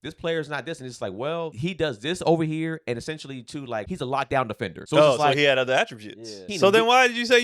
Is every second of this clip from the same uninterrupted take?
no; 4 cuts; at 1.6 s, 3.9 s, 4.8 s, 6.5 s

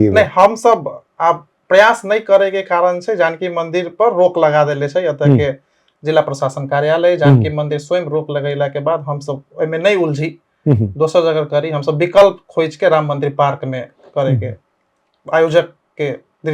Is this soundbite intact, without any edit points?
yes; 0 cuts

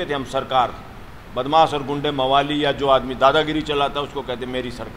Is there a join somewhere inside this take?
no; 0 cuts

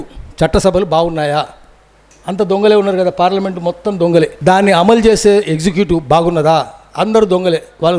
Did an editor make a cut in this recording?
yes; 1 cut; at 4.4 s

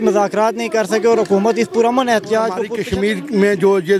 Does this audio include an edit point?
yes; 1 cut; at 2.7 s

